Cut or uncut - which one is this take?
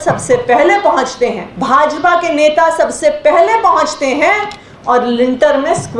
cut